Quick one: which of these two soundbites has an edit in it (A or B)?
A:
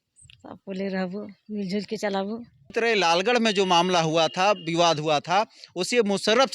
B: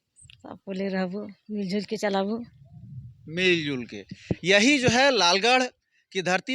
A